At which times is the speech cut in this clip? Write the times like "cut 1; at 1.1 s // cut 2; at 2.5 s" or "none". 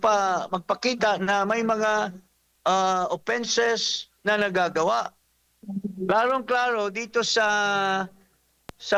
none